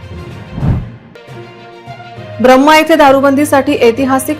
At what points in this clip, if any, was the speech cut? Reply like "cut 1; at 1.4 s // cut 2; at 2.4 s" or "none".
cut 1; at 1.0 s

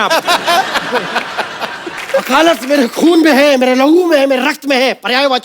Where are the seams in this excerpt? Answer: cut 1; at 2.0 s

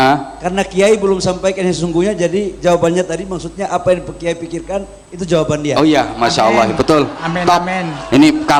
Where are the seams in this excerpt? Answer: none

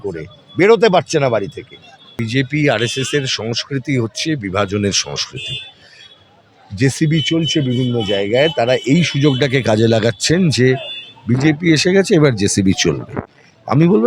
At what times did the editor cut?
cut 1; at 2.2 s

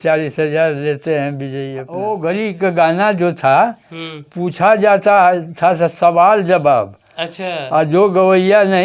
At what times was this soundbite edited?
cut 1; at 1.9 s

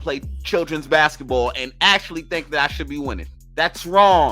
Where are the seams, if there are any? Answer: cut 1; at 3.3 s

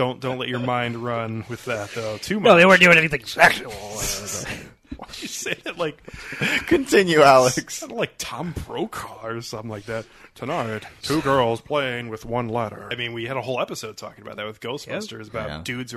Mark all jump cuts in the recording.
cut 1; at 10.9 s // cut 2; at 12.9 s

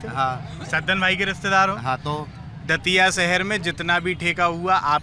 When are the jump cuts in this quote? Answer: none

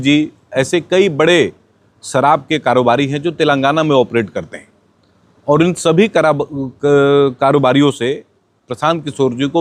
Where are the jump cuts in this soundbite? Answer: none

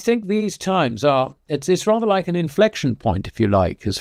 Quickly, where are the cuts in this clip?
none

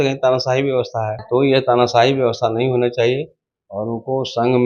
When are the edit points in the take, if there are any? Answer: cut 1; at 1.2 s

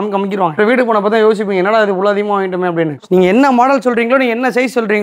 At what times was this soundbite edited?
cut 1; at 2.9 s

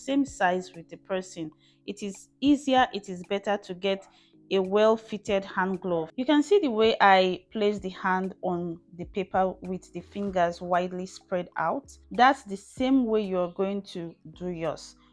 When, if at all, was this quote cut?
cut 1; at 6.1 s // cut 2; at 12.0 s

